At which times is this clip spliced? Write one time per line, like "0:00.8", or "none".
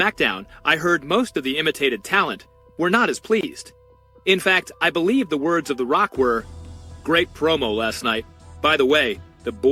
none